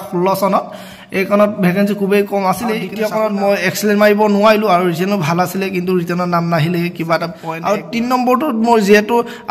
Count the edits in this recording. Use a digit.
2